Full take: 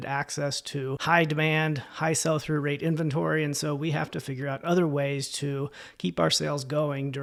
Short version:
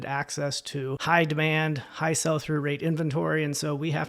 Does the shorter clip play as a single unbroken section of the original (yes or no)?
yes